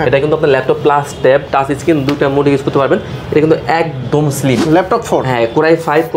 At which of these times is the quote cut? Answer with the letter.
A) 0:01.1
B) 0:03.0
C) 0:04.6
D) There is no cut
C